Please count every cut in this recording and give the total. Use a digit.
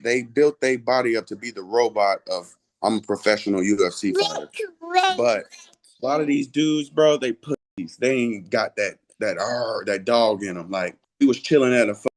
1